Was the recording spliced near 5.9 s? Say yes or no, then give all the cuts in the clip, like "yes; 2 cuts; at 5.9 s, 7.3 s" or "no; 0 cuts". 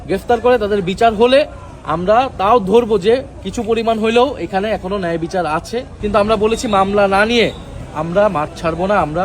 yes; 1 cut; at 5.9 s